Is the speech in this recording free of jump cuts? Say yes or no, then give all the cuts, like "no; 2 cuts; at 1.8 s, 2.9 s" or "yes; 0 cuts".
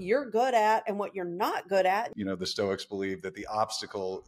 no; 1 cut; at 2.1 s